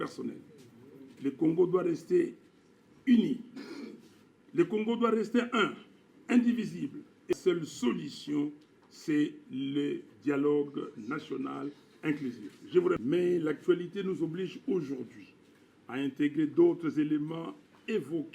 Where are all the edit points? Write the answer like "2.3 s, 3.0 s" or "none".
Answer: 7.3 s, 13.0 s